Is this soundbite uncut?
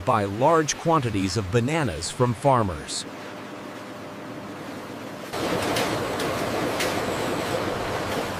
yes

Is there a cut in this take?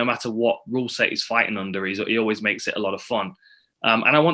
no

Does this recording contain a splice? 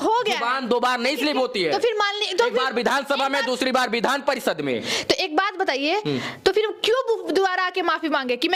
no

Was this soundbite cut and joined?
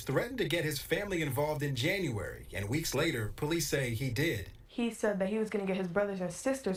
no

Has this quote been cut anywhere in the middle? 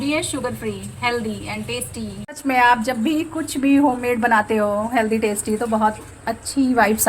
yes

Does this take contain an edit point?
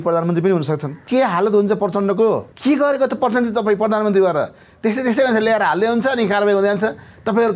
yes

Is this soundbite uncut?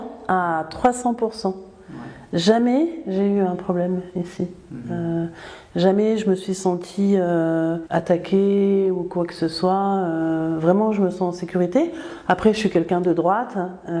yes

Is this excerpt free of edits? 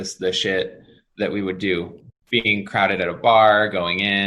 no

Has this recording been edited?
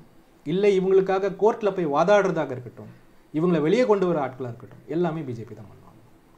no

